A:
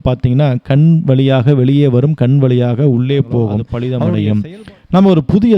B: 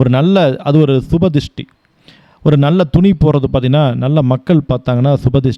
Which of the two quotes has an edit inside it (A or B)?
A